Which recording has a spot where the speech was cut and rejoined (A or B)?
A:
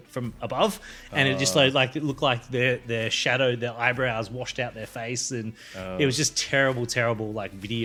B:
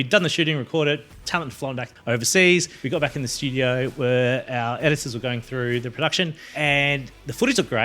B